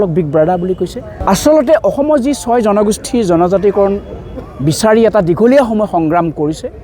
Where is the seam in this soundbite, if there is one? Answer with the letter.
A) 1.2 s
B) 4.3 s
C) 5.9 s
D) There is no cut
A